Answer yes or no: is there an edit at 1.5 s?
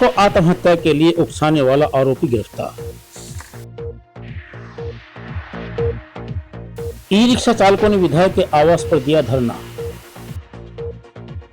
no